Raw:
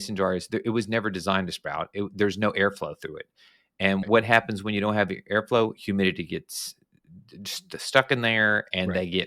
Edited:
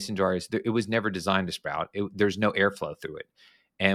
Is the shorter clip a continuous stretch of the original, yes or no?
yes